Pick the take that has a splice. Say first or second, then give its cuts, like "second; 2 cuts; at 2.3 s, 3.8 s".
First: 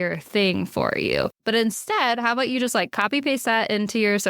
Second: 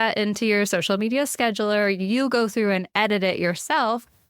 first; 1 cut; at 1.4 s